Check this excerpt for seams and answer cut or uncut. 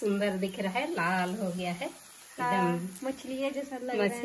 uncut